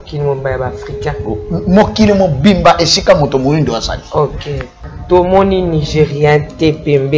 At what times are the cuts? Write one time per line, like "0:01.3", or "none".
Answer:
0:04.7